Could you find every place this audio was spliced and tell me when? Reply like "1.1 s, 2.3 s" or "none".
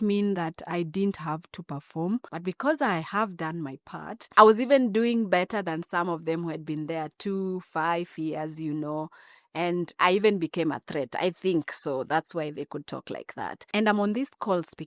2.3 s, 4.1 s, 13.6 s